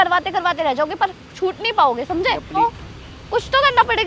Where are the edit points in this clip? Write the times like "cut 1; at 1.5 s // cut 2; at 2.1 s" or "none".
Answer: cut 1; at 2.6 s

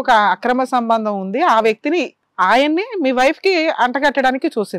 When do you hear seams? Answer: cut 1; at 2.2 s

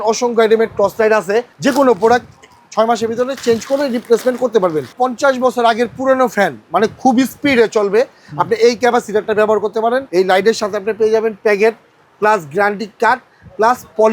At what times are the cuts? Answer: cut 1; at 1.5 s // cut 2; at 4.9 s // cut 3; at 10.1 s

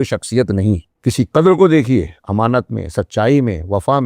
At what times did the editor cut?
cut 1; at 0.9 s

